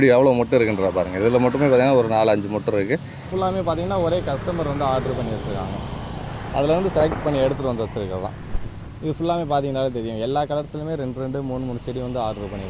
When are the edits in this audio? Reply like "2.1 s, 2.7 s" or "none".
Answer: 3.3 s